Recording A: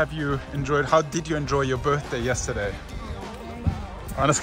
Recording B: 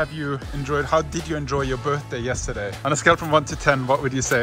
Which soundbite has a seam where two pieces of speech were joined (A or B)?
B